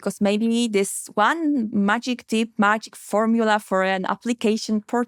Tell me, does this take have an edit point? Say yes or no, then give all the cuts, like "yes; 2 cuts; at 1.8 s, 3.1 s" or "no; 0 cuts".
no; 0 cuts